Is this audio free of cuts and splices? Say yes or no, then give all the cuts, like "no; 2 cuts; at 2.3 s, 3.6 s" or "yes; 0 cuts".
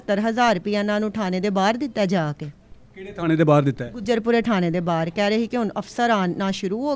yes; 0 cuts